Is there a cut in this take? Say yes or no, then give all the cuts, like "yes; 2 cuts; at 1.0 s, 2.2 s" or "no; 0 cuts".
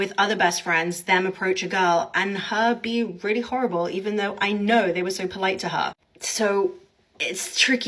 no; 0 cuts